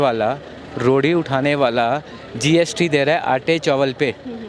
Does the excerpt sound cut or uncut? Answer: uncut